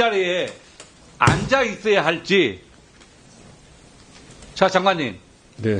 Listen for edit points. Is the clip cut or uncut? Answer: uncut